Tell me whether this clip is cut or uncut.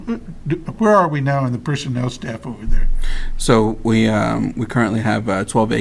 uncut